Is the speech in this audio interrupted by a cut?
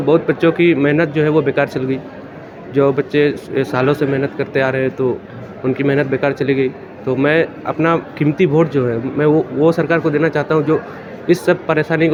no; 0 cuts

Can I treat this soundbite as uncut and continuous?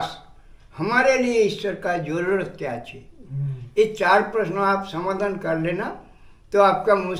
yes; 0 cuts

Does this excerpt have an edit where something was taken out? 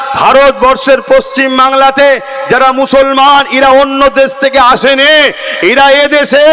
no; 0 cuts

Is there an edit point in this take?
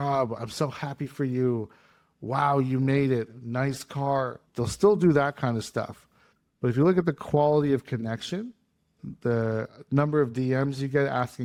no; 0 cuts

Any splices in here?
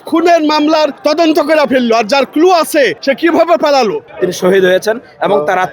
yes; 3 cuts; at 1.0 s, 3.0 s, 4.1 s

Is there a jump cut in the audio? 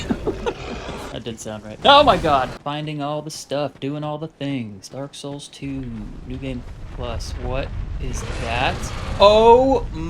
yes; 2 cuts; at 1.6 s, 2.6 s

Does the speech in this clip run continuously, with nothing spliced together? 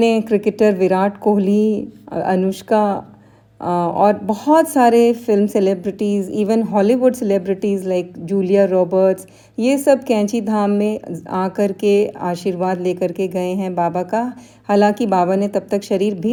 yes; 0 cuts

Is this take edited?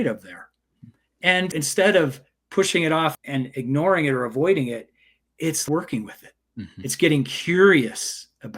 yes; 3 cuts; at 1.5 s, 3.1 s, 5.6 s

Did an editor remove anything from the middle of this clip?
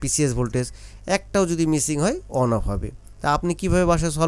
no; 0 cuts

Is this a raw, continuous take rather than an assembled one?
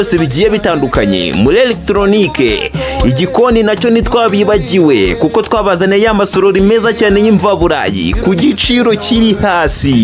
yes; 0 cuts

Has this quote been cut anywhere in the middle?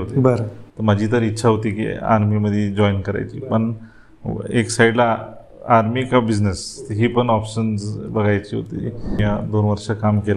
yes; 1 cut; at 9.2 s

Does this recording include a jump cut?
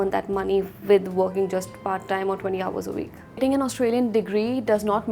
yes; 1 cut; at 3.3 s

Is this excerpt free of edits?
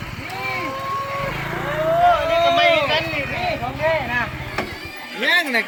yes; 0 cuts

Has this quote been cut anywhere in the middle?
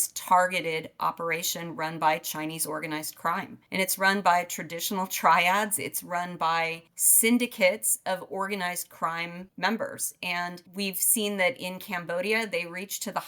no; 0 cuts

